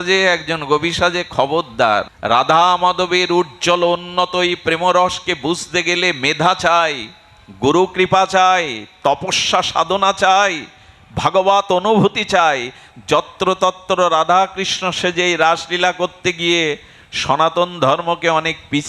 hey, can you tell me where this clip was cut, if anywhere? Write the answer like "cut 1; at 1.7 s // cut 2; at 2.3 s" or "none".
cut 1; at 2.1 s